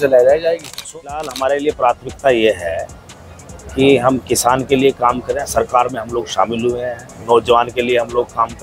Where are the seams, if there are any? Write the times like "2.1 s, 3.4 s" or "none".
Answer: 1.0 s